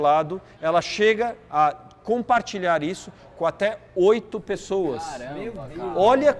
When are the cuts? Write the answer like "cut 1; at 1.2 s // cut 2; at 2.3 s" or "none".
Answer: none